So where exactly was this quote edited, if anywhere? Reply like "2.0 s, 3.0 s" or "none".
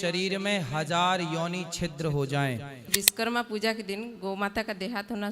2.9 s